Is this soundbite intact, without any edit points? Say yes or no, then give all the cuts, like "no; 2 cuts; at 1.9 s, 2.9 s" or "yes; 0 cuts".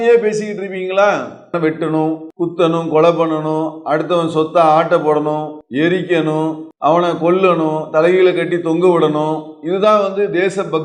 no; 4 cuts; at 1.5 s, 2.3 s, 5.6 s, 6.7 s